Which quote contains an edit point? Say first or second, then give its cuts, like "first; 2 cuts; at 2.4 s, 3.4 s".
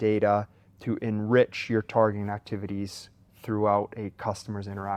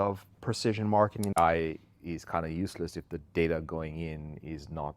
second; 1 cut; at 1.3 s